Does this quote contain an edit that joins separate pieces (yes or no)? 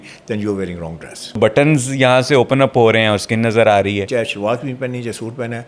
yes